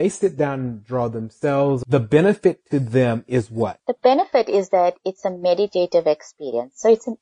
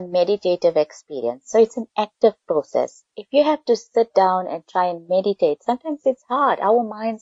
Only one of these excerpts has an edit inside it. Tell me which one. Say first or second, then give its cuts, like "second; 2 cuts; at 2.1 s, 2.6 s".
first; 2 cuts; at 1.8 s, 3.8 s